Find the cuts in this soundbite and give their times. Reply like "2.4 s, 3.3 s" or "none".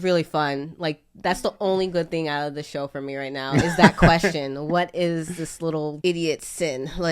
5.9 s

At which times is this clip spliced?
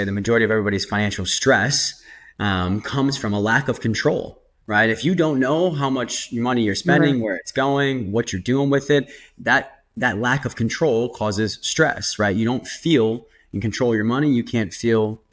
none

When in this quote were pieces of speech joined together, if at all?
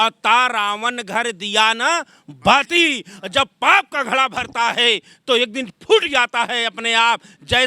none

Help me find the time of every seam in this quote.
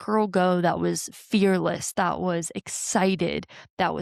none

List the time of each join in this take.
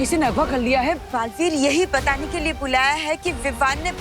1.0 s

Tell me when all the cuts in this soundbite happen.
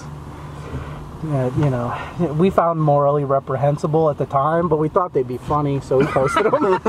none

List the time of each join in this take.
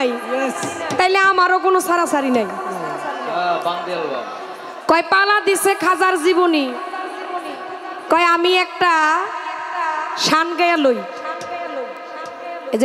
none

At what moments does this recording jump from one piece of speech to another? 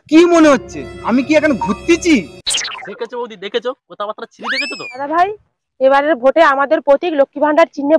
5.0 s

